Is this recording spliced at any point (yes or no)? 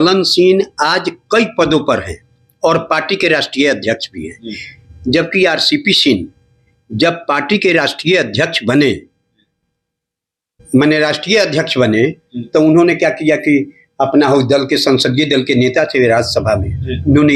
no